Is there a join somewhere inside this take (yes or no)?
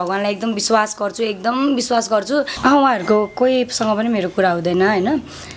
yes